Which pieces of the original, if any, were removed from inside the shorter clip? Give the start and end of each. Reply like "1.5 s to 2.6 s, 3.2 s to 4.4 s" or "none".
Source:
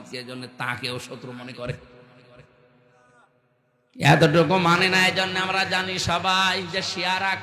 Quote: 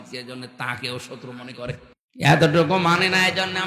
2.0 s to 3.8 s